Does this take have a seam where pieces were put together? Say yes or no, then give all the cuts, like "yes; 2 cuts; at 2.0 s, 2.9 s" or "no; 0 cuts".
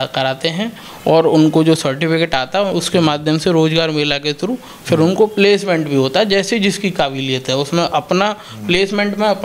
no; 0 cuts